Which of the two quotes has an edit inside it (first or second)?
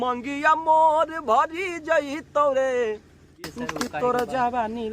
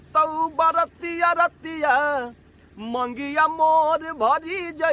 first